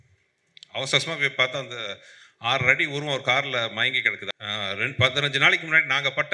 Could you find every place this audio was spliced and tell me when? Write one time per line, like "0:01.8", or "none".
0:04.1